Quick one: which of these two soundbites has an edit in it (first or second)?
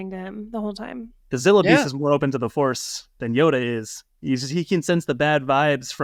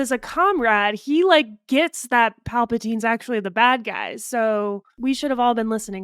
second